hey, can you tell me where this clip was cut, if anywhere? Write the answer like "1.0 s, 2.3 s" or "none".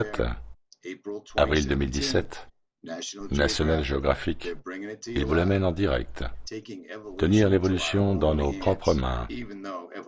8.5 s